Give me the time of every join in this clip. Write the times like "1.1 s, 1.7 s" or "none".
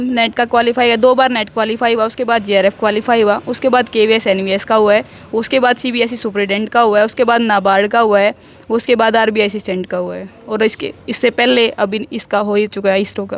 none